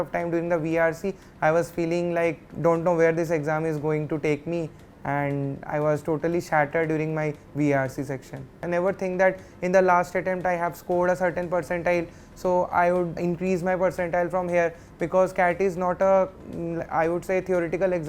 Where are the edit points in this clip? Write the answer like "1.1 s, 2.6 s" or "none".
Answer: 2.5 s, 8.6 s, 13.2 s